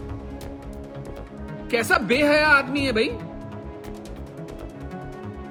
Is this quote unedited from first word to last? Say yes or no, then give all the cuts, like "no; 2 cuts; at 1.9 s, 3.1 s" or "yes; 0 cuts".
yes; 0 cuts